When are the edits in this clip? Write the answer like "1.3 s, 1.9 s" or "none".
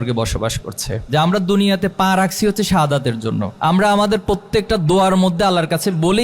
1.0 s, 3.5 s